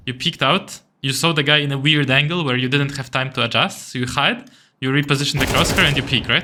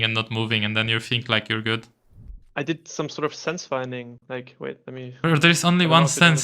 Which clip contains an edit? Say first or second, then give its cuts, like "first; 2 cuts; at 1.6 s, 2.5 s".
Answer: second; 1 cut; at 2.3 s